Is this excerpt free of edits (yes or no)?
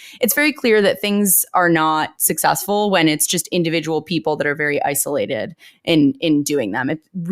no